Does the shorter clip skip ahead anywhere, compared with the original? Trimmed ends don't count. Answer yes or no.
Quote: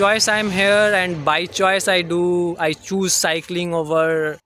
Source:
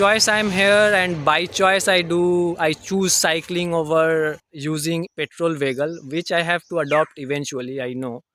no